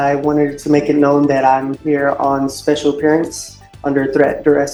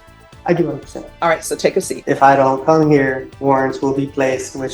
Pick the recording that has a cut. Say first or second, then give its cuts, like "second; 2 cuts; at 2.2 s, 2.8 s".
second; 2 cuts; at 1.9 s, 3.3 s